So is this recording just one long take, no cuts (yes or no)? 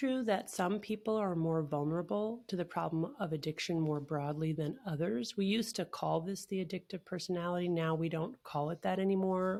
yes